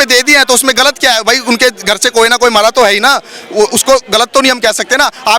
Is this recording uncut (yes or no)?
yes